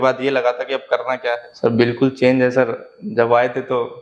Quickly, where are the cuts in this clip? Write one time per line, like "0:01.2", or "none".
0:01.5